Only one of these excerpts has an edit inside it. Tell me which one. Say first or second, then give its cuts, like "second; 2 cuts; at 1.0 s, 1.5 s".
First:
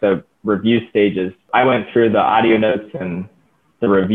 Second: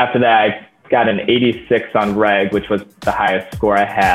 first; 1 cut; at 1.5 s